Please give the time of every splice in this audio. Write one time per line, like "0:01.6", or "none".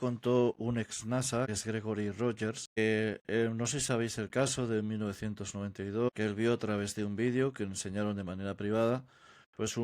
0:01.5
0:02.8
0:06.1